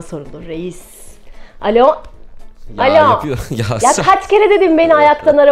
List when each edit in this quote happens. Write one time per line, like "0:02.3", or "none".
none